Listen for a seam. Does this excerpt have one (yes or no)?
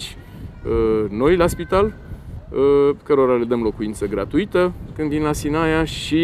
no